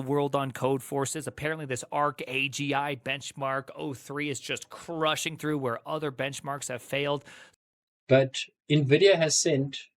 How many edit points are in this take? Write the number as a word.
one